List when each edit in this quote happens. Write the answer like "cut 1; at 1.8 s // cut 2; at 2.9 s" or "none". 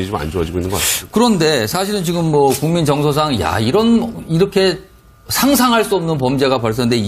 cut 1; at 3.5 s